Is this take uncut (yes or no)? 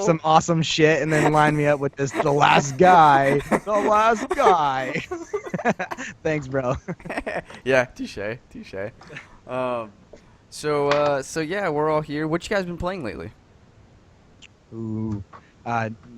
no